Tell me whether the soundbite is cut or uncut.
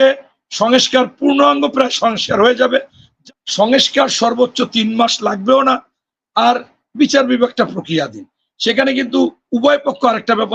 cut